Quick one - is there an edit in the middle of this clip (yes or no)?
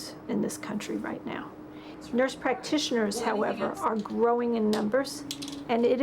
yes